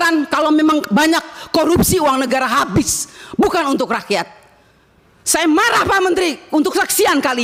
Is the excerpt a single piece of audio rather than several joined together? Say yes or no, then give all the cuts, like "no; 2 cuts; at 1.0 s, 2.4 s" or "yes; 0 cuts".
yes; 0 cuts